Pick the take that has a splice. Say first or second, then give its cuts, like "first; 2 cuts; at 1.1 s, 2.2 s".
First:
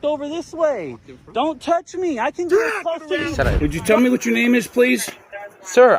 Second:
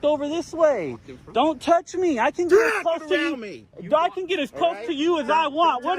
first; 1 cut; at 3.3 s